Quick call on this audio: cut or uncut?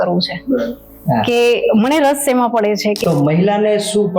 cut